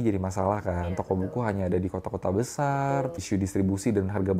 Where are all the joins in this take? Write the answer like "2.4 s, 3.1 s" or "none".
3.2 s